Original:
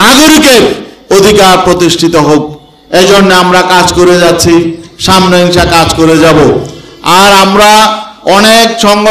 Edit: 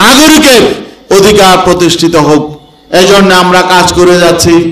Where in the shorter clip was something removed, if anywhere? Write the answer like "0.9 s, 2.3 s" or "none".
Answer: none